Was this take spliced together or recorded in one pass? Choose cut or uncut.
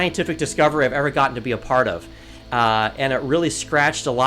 uncut